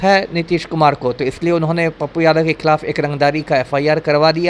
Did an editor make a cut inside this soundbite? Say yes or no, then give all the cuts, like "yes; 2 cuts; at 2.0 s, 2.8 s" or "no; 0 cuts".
no; 0 cuts